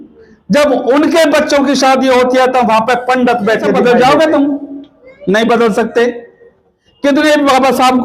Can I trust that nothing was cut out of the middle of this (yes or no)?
no